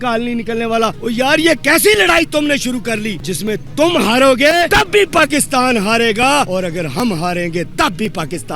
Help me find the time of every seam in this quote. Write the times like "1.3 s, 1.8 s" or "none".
1.0 s, 3.2 s, 4.7 s, 6.5 s